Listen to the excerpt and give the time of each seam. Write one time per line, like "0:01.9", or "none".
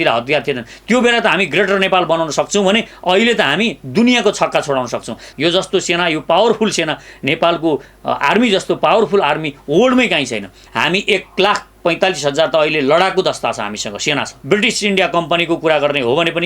0:05.2
0:10.6
0:14.4